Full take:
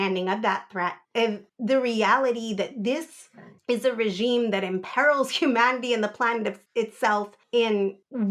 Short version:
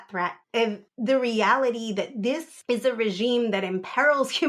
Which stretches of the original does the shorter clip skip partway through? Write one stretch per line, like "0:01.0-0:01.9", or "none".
0:03.1-0:03.5